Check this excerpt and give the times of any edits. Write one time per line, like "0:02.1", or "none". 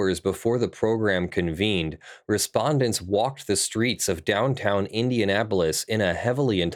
none